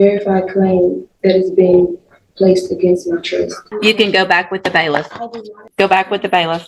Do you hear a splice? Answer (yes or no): yes